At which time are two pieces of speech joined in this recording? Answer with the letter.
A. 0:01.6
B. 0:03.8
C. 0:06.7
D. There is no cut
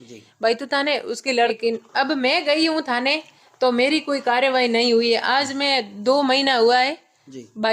A